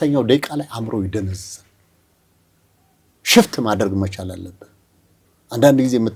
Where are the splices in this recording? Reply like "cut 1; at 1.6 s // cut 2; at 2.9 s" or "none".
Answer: none

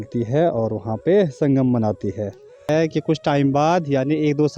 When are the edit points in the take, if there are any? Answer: cut 1; at 2.7 s

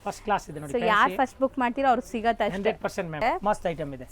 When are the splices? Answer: cut 1; at 3.2 s

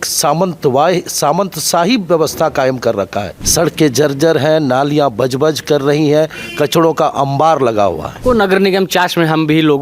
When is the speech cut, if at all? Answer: cut 1; at 3.4 s // cut 2; at 8.1 s

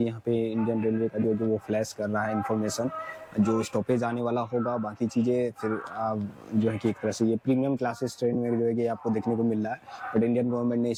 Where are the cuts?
none

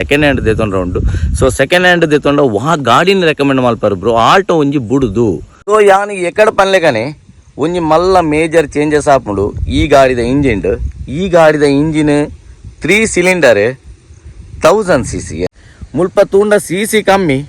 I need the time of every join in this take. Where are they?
cut 1; at 5.5 s // cut 2; at 15.6 s

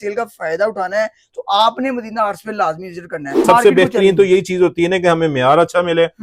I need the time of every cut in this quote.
cut 1; at 3.3 s

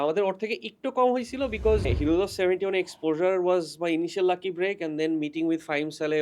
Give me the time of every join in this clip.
cut 1; at 1.9 s

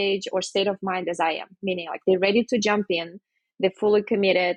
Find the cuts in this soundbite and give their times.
none

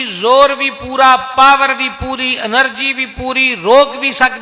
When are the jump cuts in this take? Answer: none

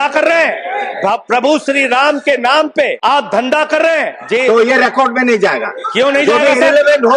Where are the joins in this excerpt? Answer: cut 1; at 3.0 s // cut 2; at 4.2 s

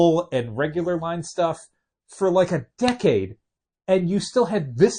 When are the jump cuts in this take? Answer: none

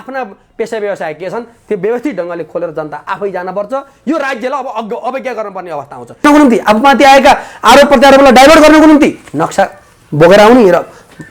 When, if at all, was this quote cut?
cut 1; at 6.2 s

